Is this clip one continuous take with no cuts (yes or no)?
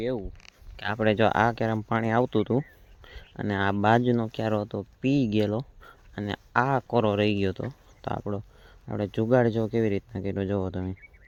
yes